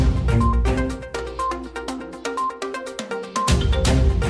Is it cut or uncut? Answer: cut